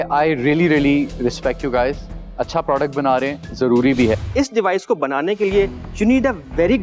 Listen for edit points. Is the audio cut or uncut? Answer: cut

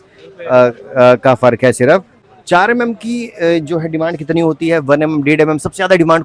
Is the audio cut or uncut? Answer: cut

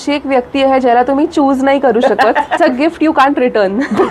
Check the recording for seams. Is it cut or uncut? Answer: cut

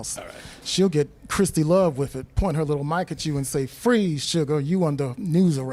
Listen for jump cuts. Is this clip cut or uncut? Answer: uncut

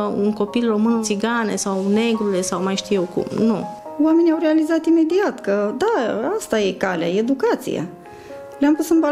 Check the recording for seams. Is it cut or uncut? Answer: cut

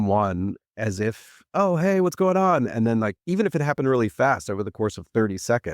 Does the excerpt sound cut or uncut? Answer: cut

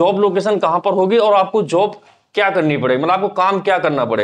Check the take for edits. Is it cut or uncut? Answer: uncut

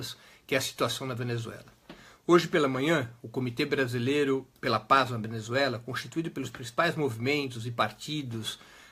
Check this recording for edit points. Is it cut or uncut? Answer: cut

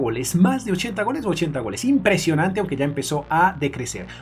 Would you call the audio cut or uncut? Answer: uncut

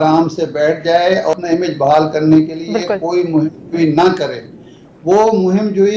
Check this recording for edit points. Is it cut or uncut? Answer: uncut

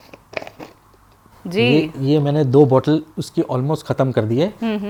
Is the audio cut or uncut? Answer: uncut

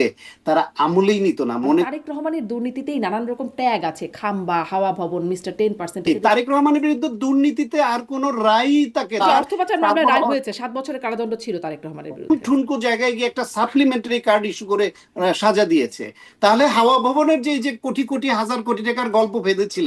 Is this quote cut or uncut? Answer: cut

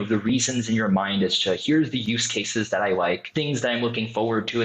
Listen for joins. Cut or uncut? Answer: cut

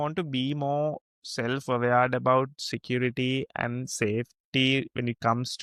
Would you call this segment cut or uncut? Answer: uncut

